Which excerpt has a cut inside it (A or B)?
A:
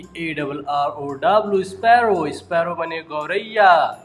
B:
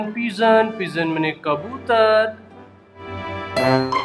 B